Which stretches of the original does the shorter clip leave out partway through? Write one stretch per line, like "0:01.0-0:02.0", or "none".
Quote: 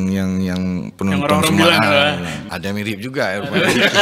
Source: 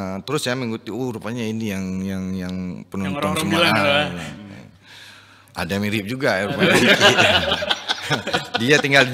0:04.4-0:05.5